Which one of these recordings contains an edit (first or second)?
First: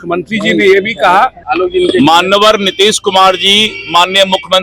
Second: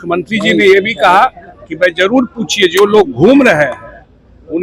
first